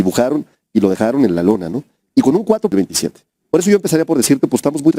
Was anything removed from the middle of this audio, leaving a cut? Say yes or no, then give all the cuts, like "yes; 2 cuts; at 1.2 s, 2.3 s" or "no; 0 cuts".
yes; 1 cut; at 2.7 s